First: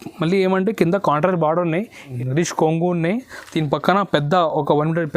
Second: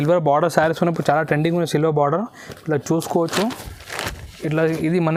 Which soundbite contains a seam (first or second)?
first